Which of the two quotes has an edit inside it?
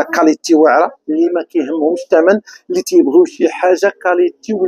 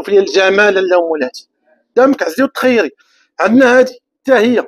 second; 1 cut; at 1.8 s

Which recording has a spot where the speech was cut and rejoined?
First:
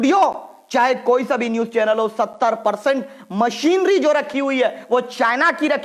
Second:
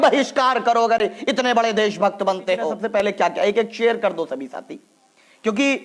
second; 1 cut; at 2.8 s

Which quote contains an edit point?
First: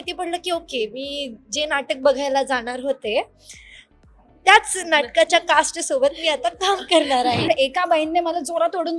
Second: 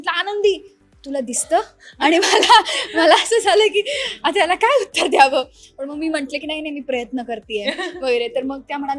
first; 1 cut; at 7.5 s

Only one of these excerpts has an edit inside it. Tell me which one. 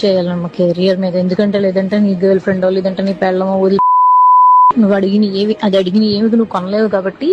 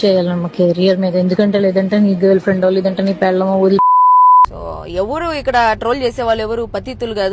second; 1 cut; at 4.4 s

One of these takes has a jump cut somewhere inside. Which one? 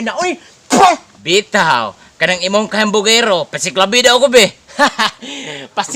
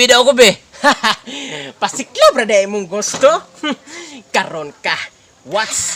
first; 1 cut; at 1.1 s

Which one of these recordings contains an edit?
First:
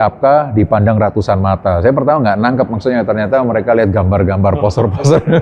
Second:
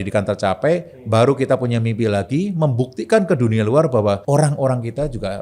second; 1 cut; at 4.2 s

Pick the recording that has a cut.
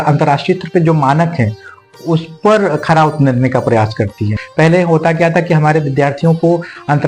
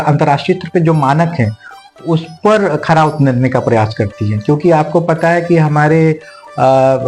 first; 1 cut; at 4.3 s

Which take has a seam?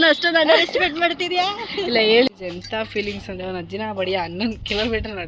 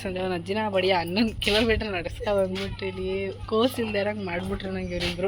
first; 1 cut; at 2.3 s

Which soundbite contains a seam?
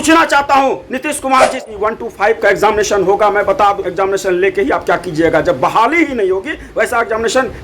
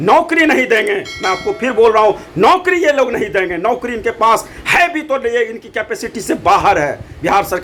first; 1 cut; at 1.6 s

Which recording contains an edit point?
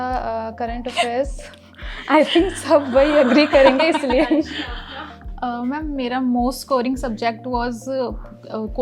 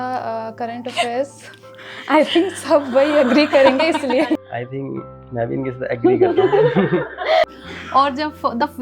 second; 2 cuts; at 4.4 s, 7.4 s

